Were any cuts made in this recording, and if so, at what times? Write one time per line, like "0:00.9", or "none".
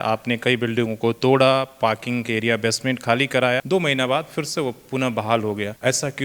none